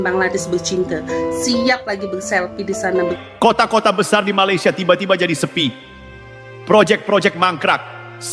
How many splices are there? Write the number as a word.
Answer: one